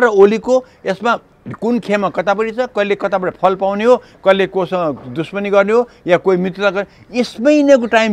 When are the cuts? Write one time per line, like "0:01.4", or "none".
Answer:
none